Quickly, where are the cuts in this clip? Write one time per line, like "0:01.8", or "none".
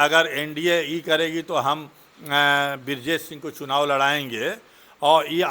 none